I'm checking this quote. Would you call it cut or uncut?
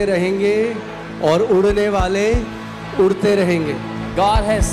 uncut